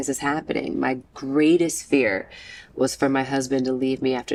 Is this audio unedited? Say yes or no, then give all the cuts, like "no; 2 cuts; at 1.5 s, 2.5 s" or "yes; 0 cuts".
yes; 0 cuts